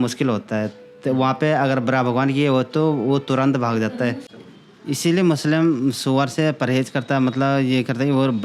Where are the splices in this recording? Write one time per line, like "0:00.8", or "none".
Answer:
0:04.2